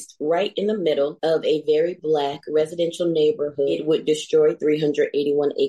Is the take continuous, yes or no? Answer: no